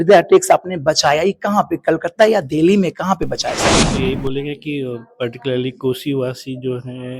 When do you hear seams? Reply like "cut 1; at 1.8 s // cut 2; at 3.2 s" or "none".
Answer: cut 1; at 3.8 s